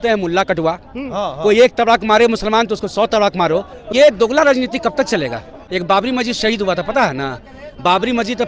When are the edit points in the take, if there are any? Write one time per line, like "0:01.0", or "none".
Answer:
0:03.8
0:05.7